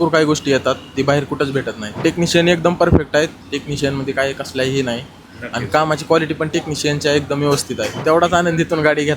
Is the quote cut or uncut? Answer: cut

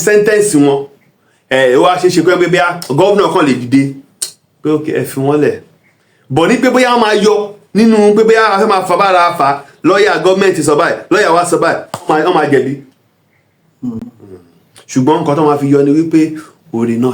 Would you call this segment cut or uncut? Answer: uncut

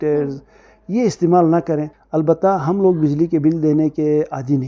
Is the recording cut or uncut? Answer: cut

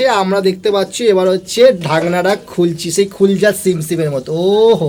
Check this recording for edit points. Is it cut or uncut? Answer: uncut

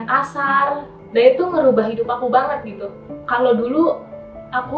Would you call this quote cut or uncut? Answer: cut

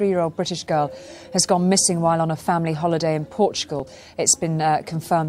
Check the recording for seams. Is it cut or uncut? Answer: uncut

